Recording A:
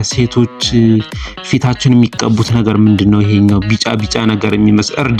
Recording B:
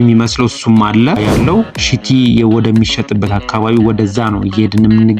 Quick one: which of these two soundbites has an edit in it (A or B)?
B